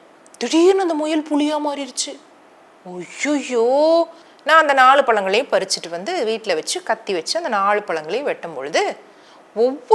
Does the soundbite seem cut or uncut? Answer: cut